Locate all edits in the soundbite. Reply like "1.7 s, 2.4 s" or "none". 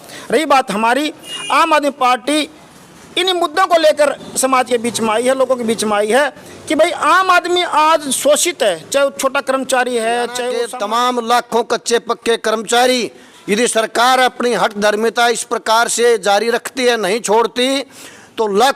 10.6 s